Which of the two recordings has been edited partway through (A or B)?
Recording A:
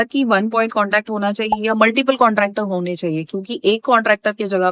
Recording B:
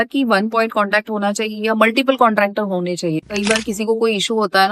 B